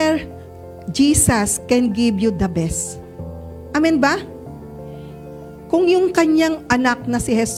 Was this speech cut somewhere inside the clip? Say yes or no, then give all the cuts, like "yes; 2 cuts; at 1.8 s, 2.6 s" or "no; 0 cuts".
no; 0 cuts